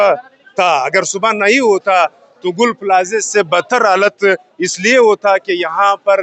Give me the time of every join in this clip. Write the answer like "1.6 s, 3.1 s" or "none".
none